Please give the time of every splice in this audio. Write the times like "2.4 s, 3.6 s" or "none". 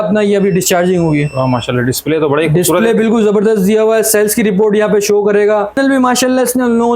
5.8 s